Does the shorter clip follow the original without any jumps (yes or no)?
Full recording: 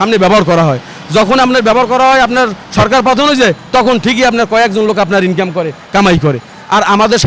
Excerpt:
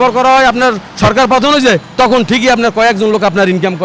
yes